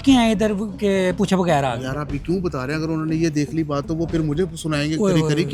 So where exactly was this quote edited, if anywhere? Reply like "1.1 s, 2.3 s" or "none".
none